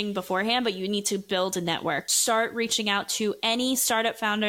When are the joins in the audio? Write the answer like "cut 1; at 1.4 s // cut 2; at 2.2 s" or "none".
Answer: cut 1; at 2.1 s